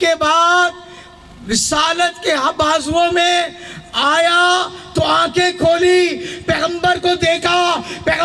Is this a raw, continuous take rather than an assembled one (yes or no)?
yes